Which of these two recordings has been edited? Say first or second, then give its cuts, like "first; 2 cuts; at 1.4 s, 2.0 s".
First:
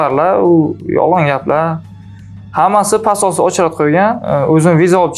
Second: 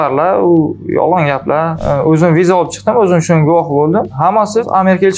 second; 1 cut; at 1.8 s